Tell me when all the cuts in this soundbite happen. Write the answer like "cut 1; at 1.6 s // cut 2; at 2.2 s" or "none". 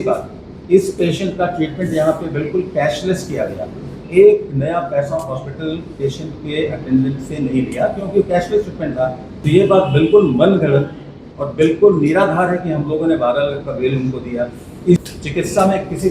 cut 1; at 9.3 s // cut 2; at 15.0 s